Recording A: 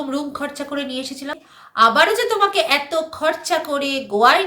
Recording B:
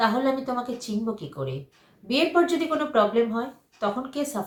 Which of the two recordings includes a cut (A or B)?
A